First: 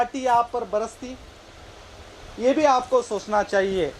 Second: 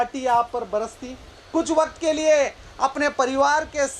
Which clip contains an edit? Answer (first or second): second